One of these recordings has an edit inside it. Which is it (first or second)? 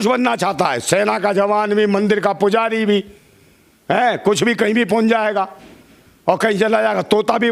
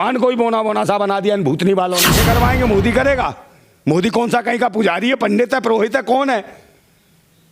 second